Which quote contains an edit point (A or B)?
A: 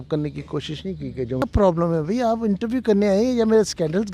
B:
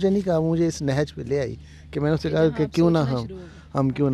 A